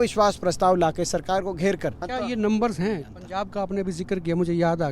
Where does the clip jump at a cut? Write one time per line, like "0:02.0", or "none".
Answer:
0:02.0
0:03.2